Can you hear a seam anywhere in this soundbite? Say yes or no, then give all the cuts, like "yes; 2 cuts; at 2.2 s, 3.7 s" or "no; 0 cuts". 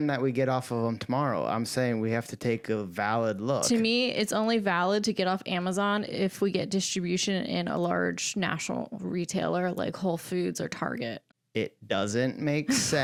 no; 0 cuts